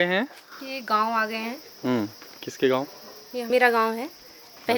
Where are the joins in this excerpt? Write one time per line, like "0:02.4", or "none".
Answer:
0:03.5